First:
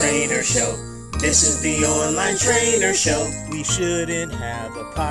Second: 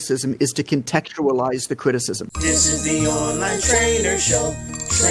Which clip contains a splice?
second; 1 cut; at 2.3 s

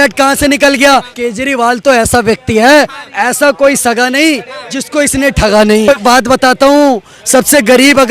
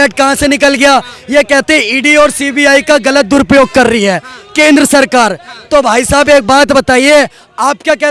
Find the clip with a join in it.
first; 2 cuts; at 1.1 s, 5.9 s

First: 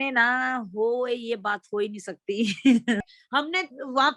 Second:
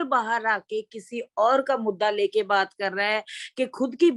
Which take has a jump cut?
first; 1 cut; at 3.2 s

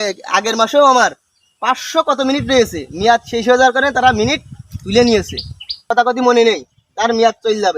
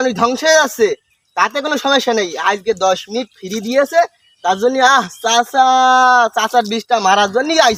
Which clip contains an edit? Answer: first; 1 cut; at 5.9 s

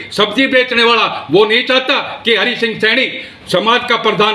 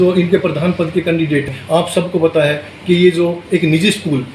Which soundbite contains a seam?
second; 1 cut; at 1.5 s

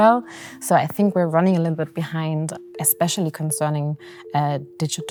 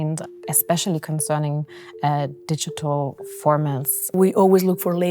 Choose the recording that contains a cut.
second; 1 cut; at 4.1 s

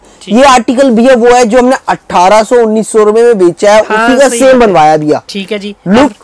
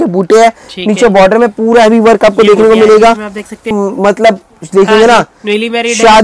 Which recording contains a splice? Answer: second; 1 cut; at 3.7 s

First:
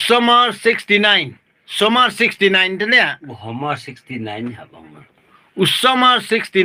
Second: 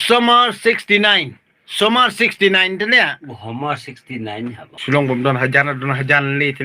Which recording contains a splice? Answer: second; 1 cut; at 4.7 s

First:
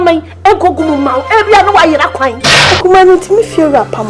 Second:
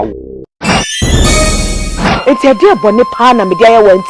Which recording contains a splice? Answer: first; 1 cut; at 2.6 s

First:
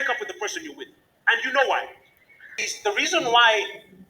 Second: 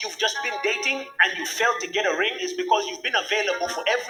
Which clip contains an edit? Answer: first; 1 cut; at 2.7 s

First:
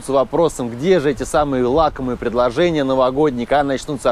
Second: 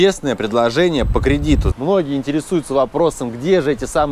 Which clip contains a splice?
second; 1 cut; at 1.7 s

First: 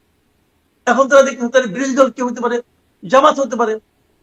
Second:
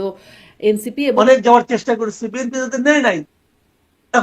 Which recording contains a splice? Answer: second; 1 cut; at 1.2 s

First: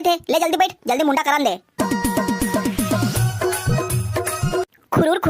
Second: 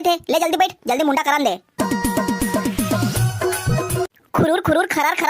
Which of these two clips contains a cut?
second; 1 cut; at 3.9 s

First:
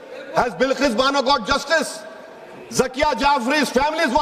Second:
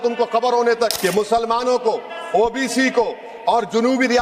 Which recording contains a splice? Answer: second; 1 cut; at 1.0 s

